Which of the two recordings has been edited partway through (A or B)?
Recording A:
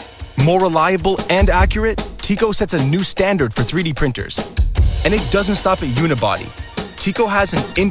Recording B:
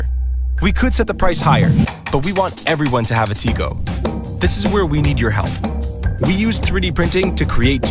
B